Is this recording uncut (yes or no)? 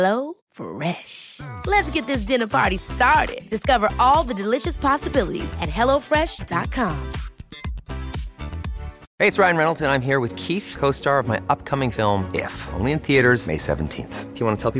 yes